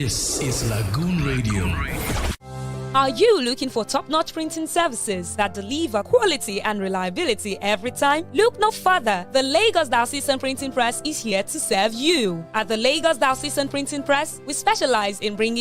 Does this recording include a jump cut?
yes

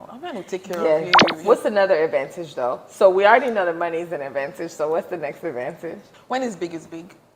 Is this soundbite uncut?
no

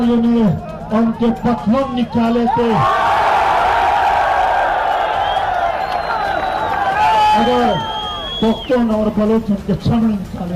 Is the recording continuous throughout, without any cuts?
yes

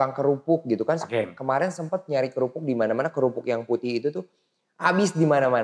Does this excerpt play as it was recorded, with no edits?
yes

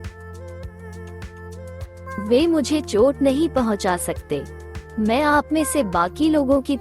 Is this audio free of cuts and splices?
no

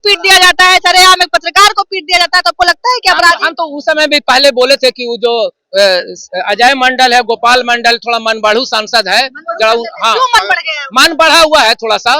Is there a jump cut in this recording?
no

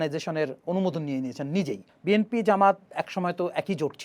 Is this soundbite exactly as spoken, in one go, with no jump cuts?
no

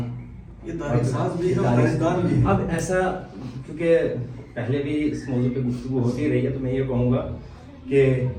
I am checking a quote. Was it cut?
no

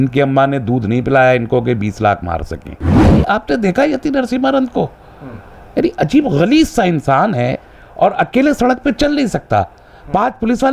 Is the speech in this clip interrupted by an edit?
yes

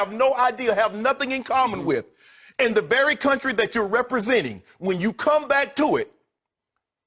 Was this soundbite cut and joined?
no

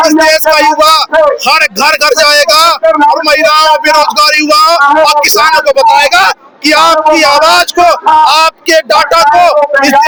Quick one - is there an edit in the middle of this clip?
no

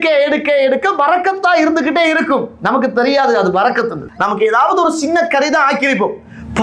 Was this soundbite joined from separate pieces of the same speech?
yes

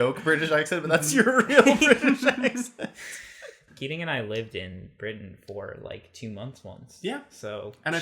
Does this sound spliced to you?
yes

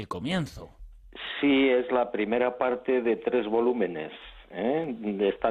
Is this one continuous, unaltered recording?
no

